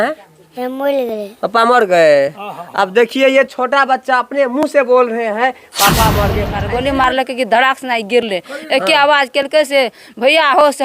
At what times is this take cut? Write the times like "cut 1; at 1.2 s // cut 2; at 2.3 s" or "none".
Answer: cut 1; at 6.5 s